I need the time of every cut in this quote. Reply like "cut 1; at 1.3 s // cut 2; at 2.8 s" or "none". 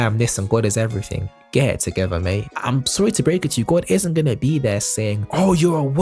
cut 1; at 2.5 s